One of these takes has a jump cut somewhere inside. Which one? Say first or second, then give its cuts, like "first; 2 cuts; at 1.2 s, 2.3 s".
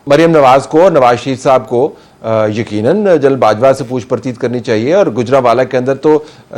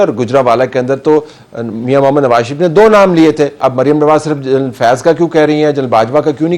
second; 1 cut; at 3.6 s